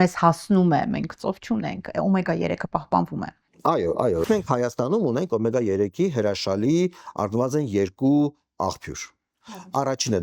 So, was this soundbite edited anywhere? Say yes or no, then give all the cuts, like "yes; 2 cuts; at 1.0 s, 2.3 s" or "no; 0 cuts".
yes; 1 cut; at 4.2 s